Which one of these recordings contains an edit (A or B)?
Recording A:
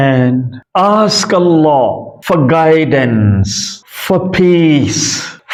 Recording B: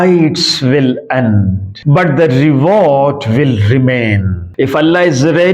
B